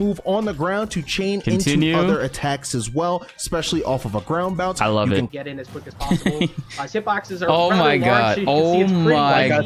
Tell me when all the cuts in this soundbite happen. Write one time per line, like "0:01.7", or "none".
0:00.9
0:05.3